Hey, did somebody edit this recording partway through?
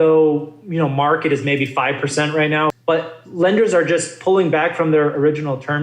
yes; 1 cut; at 2.7 s

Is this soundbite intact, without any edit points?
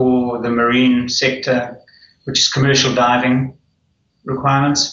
yes; 0 cuts

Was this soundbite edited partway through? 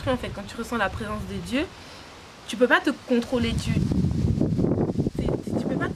no; 0 cuts

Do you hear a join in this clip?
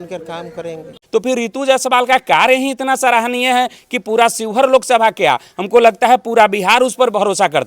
yes; 1 cut; at 1.0 s

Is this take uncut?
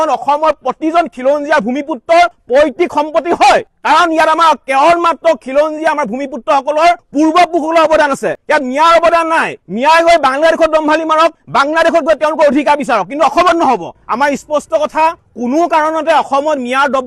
no; 2 cuts; at 13.9 s, 15.2 s

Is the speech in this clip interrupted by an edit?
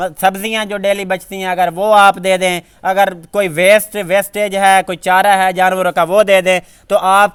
no; 0 cuts

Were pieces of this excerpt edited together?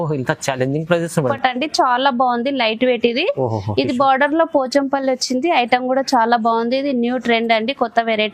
yes; 1 cut; at 1.3 s

